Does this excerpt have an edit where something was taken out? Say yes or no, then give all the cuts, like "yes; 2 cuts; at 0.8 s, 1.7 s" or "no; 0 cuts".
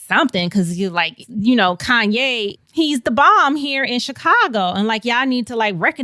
yes; 1 cut; at 1.2 s